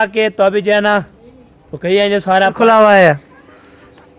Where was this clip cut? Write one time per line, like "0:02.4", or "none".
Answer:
0:02.6